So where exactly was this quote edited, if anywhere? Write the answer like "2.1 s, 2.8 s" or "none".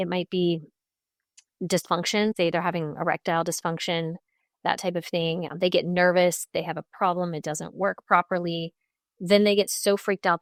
none